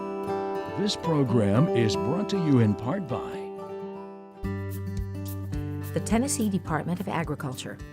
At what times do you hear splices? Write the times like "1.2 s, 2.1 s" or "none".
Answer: 1.0 s